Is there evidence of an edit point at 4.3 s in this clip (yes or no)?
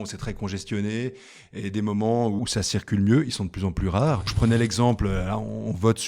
yes